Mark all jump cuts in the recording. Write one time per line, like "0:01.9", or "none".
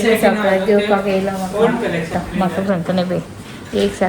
0:02.1